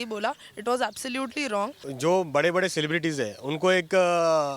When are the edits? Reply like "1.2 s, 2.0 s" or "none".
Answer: 1.8 s